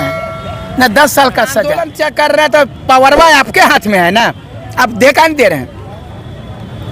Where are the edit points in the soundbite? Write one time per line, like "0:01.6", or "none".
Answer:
0:01.9